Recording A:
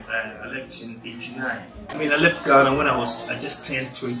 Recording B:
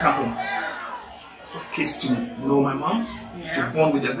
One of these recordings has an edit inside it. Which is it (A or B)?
A